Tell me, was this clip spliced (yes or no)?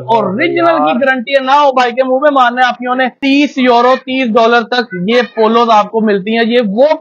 yes